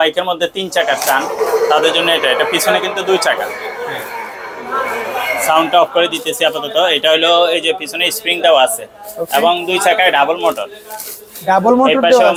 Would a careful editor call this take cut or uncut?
uncut